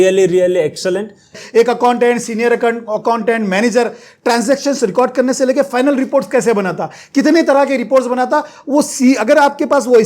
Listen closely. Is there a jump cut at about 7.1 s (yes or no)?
no